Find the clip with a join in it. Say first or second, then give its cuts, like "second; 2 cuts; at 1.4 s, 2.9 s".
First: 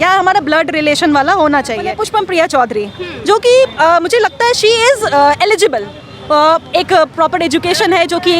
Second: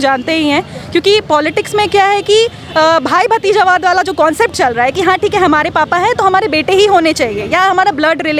first; 1 cut; at 2.0 s